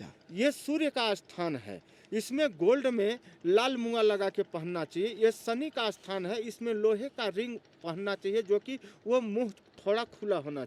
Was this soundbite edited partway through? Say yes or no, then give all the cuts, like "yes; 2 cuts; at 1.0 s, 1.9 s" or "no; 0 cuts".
no; 0 cuts